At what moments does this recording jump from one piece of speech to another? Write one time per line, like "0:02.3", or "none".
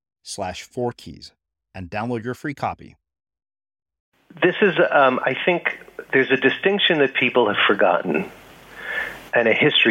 0:04.4